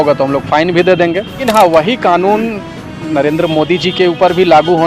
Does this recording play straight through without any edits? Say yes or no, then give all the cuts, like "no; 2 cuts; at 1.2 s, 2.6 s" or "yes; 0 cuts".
no; 1 cut; at 1.4 s